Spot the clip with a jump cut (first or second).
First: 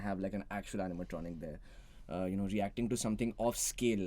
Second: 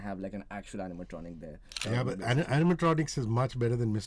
second